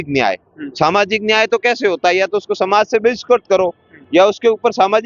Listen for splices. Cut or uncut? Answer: uncut